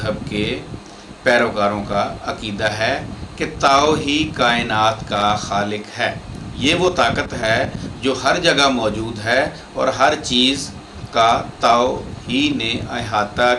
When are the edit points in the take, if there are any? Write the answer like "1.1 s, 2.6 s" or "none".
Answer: none

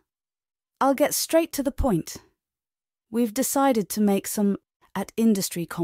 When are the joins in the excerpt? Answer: 4.7 s

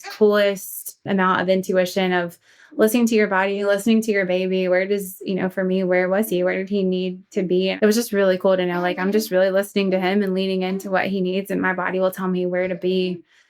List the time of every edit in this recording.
1.0 s

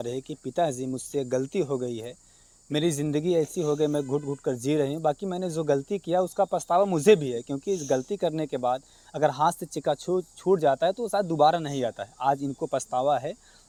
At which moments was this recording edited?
none

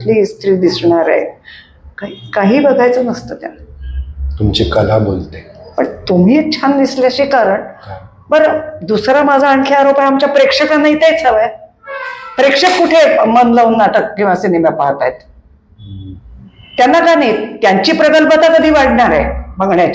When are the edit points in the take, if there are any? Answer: none

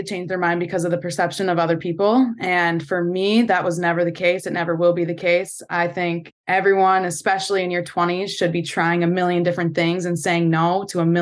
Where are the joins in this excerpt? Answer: none

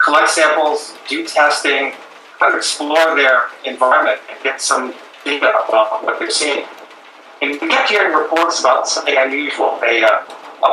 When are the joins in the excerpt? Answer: 5.5 s

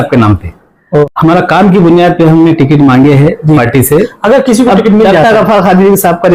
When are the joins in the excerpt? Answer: 1.1 s

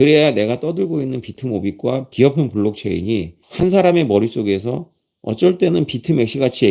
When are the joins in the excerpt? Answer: 2.1 s, 3.4 s

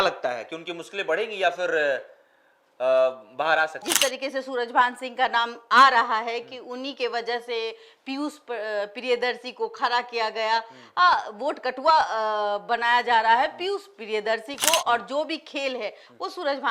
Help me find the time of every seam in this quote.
3.8 s

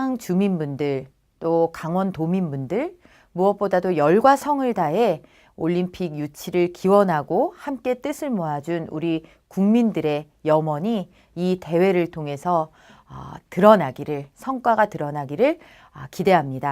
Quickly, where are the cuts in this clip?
4.9 s

